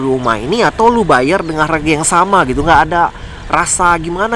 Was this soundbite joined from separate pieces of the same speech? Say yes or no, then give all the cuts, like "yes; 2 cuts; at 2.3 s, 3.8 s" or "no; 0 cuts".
no; 0 cuts